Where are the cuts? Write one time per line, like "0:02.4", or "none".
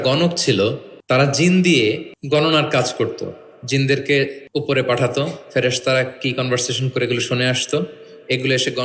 0:00.9
0:02.1
0:04.4